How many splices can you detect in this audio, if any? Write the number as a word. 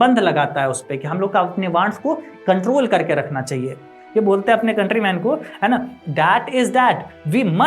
one